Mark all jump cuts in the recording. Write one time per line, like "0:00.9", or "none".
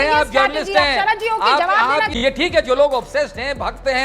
0:02.1